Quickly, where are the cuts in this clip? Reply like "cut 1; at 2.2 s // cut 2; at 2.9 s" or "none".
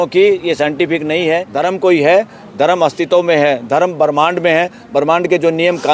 cut 1; at 1.5 s